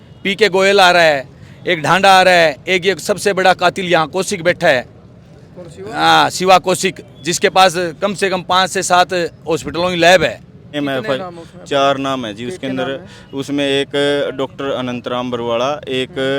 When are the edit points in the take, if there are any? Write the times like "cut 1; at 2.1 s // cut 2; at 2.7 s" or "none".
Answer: cut 1; at 10.7 s